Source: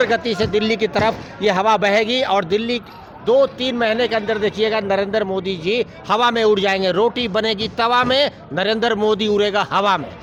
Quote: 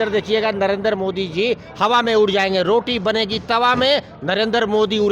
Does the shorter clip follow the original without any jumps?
yes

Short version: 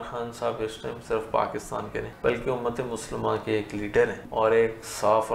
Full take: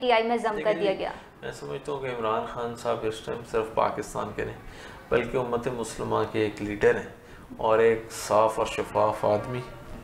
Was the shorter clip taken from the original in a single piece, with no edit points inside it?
no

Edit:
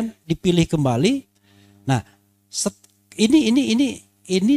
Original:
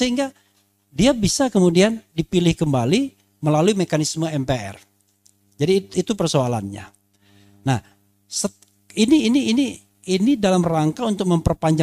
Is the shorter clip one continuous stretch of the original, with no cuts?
no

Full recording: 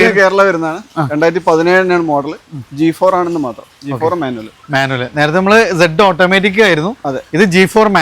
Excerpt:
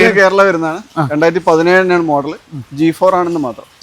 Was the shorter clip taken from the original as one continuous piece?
yes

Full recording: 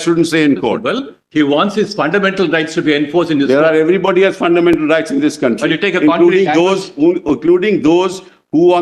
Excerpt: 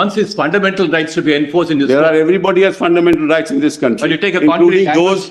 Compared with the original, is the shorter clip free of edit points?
yes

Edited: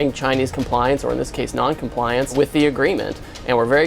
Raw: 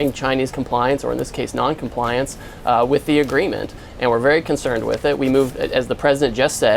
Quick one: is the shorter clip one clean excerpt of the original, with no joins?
no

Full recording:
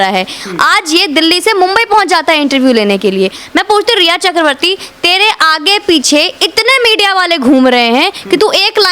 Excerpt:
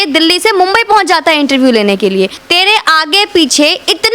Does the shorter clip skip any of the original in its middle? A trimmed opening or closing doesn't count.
yes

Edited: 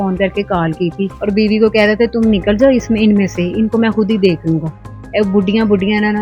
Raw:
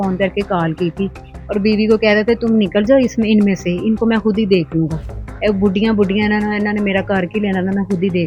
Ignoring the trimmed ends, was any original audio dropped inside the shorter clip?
yes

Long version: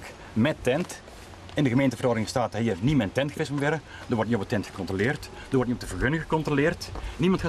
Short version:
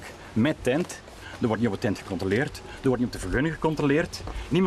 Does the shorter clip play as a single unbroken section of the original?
no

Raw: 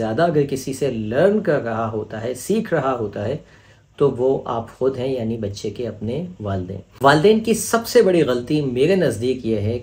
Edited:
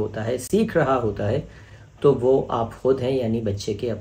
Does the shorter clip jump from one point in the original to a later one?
no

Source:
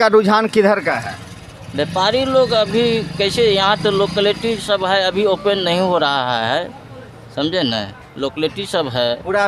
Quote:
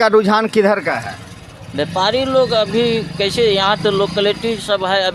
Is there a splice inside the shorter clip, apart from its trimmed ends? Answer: no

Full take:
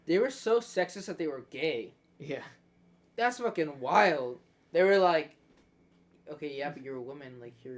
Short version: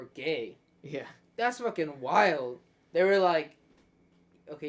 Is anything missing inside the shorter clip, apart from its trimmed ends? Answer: yes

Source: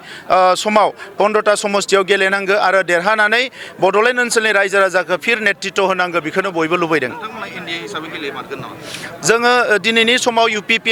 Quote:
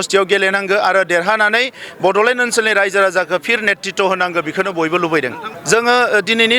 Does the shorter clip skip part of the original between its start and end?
yes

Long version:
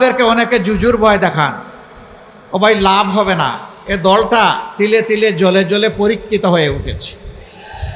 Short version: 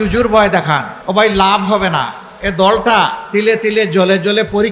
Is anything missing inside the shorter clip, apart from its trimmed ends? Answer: yes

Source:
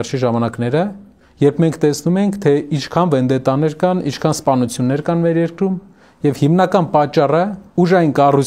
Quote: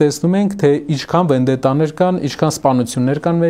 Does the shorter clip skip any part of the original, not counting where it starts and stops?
no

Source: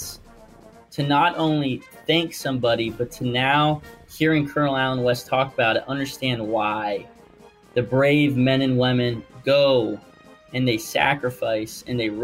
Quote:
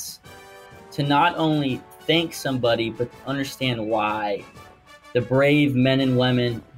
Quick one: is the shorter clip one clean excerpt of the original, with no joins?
no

